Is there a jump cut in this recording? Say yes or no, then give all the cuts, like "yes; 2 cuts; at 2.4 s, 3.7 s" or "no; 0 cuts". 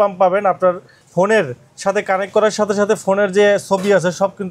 no; 0 cuts